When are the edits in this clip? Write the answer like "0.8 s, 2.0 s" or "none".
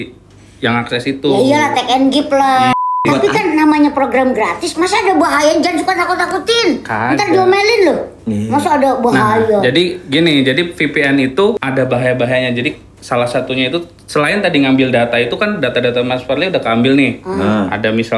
2.9 s